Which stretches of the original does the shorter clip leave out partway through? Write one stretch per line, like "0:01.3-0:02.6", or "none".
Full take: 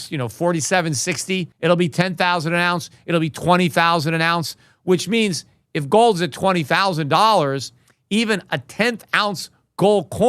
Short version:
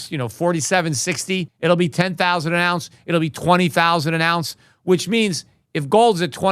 none